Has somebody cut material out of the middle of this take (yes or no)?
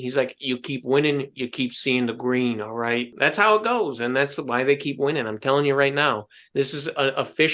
yes